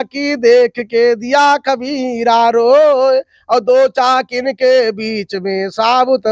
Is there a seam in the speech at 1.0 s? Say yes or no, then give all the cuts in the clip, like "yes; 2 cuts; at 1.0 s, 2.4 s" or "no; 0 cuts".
no; 0 cuts